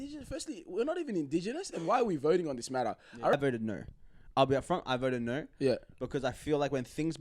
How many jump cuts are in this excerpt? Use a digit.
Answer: 1